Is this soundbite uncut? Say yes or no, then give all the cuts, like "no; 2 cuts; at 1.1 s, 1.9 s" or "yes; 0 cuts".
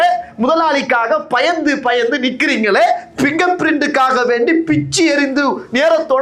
yes; 0 cuts